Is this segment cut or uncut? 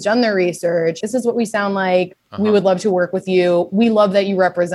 cut